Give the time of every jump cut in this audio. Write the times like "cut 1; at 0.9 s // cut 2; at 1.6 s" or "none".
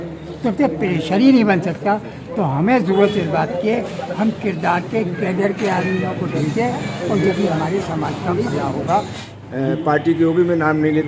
cut 1; at 9.2 s